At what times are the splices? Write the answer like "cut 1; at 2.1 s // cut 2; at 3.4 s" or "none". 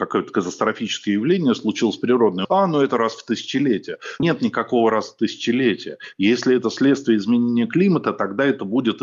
cut 1; at 2.4 s // cut 2; at 4.2 s